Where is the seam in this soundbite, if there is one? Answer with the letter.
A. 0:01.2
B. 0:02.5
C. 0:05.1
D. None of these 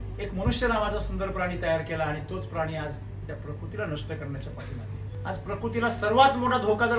C